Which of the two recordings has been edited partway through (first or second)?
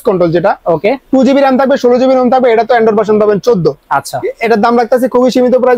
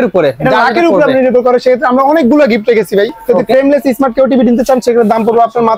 second